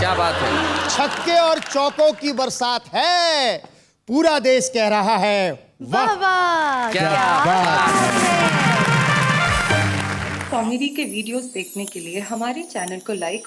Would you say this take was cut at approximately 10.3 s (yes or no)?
yes